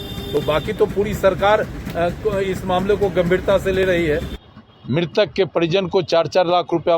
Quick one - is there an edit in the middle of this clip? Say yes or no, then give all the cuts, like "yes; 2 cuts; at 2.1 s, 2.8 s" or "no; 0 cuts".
yes; 1 cut; at 4.3 s